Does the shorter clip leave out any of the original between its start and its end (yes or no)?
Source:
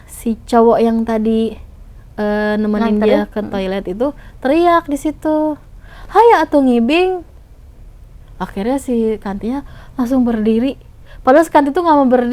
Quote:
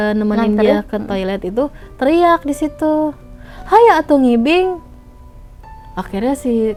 no